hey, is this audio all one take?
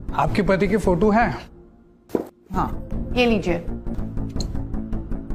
no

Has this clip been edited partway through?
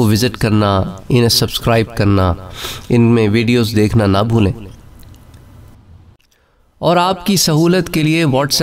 yes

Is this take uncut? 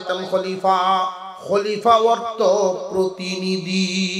no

